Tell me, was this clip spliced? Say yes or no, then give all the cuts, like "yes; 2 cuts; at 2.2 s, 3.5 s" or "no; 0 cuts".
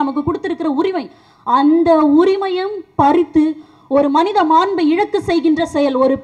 no; 0 cuts